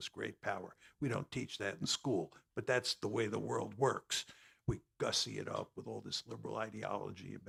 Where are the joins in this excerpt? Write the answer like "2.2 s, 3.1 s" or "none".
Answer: none